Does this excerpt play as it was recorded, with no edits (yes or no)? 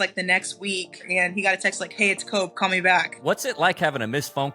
no